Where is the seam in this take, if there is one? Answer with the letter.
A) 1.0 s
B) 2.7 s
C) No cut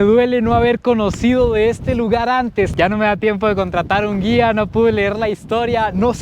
B